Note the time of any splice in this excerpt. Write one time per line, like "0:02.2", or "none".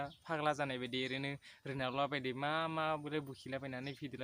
none